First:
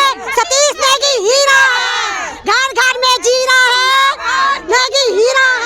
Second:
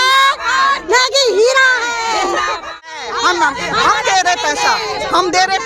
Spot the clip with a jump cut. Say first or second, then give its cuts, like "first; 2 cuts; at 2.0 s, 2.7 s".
second; 1 cut; at 2.9 s